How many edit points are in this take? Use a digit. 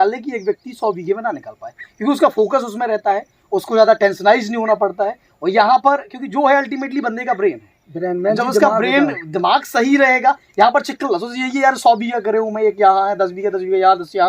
0